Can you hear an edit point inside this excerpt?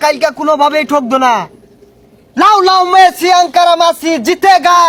no; 0 cuts

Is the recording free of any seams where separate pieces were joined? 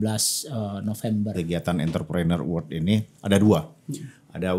no; 1 cut; at 1.3 s

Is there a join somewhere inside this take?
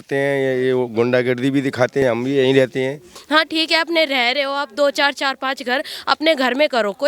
yes; 2 cuts; at 2.0 s, 3.0 s

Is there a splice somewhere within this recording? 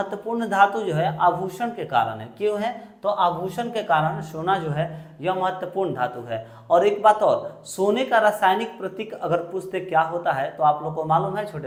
no; 0 cuts

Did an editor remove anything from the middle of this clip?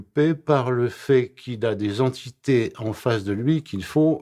no; 0 cuts

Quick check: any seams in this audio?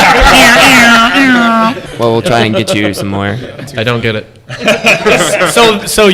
yes; 2 cuts; at 1.8 s, 3.7 s

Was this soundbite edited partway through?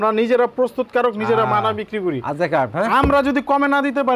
no; 0 cuts

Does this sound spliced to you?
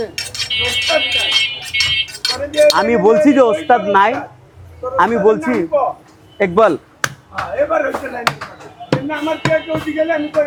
no; 0 cuts

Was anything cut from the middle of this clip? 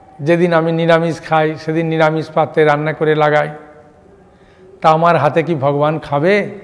no; 0 cuts

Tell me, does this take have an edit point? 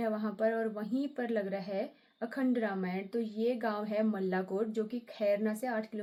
no; 0 cuts

